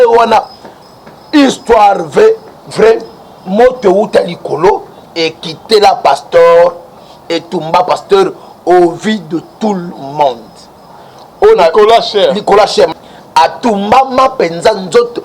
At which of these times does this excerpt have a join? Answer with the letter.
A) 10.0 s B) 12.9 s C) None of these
B